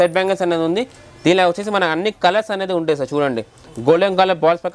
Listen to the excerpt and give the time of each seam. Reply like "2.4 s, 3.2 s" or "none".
none